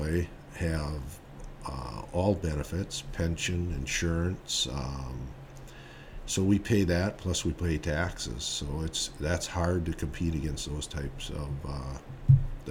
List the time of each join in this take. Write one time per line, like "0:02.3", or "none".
none